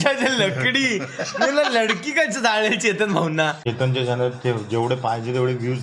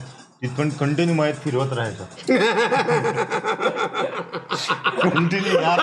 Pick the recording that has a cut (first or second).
first